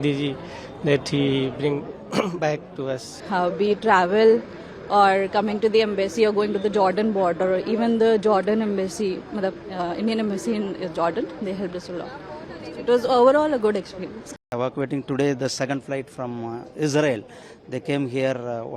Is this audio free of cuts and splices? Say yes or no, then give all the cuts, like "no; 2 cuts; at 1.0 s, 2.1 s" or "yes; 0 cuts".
no; 2 cuts; at 3.2 s, 14.5 s